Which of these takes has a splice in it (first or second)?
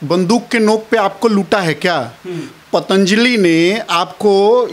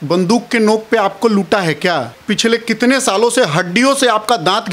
second